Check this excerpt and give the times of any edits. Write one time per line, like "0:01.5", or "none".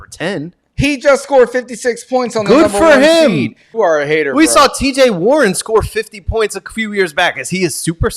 0:03.7